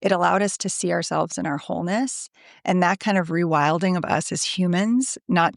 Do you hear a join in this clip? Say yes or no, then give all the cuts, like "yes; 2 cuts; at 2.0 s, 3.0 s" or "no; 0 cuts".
no; 0 cuts